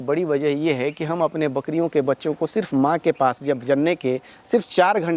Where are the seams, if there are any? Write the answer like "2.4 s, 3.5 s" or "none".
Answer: none